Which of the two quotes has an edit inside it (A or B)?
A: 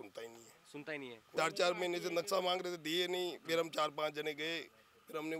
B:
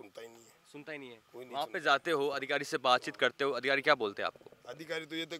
A